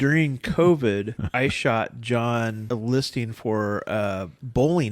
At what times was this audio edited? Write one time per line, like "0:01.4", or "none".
0:01.2
0:02.6